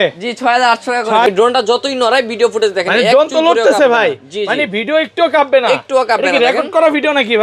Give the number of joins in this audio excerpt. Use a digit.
1